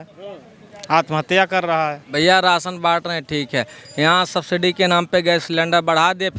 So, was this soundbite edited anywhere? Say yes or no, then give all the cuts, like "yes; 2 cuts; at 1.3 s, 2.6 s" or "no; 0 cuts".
yes; 1 cut; at 2.0 s